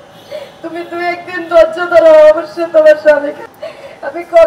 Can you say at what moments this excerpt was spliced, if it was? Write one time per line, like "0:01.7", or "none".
0:03.4